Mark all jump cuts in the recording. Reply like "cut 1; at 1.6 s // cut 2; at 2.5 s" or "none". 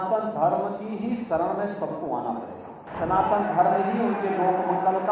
cut 1; at 2.8 s